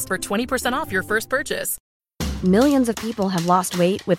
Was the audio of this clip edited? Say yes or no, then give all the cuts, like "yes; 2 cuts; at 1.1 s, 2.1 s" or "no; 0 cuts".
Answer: no; 0 cuts